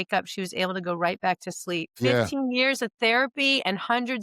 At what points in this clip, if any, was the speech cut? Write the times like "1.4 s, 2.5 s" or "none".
1.9 s